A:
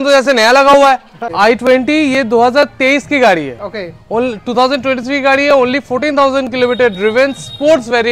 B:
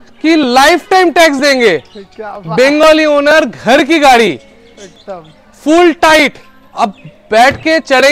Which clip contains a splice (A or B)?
A